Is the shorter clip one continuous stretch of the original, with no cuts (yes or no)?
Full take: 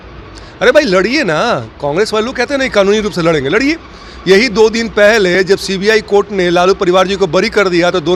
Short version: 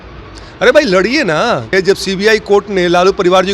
no